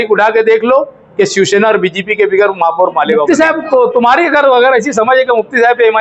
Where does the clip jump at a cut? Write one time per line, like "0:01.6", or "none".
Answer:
0:03.3